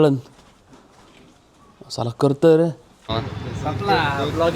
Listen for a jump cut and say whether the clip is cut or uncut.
cut